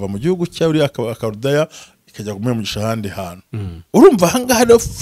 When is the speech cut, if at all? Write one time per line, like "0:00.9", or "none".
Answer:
none